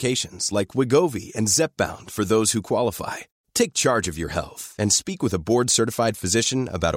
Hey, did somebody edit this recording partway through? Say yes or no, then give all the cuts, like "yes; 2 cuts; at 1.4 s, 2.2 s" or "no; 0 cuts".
no; 0 cuts